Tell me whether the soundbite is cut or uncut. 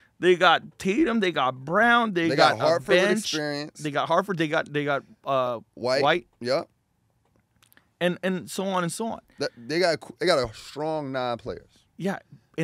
uncut